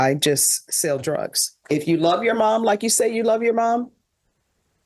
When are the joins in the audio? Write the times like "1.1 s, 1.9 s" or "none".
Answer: 1.6 s